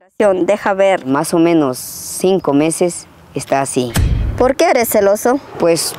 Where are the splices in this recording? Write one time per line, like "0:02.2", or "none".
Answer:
0:01.1
0:04.4